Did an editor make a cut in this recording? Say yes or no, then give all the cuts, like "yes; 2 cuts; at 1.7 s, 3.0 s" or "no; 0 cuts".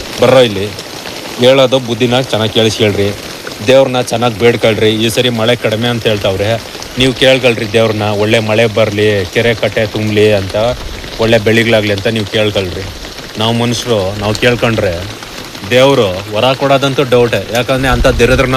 no; 0 cuts